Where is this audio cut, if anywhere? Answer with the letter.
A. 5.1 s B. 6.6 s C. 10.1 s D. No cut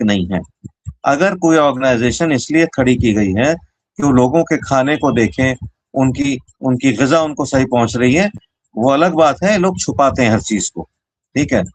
D